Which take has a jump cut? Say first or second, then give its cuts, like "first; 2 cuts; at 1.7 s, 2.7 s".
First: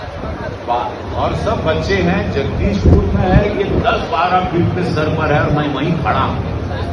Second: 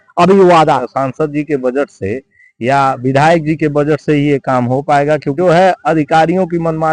second; 2 cuts; at 0.9 s, 5.3 s